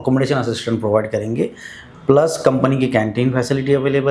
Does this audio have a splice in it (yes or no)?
no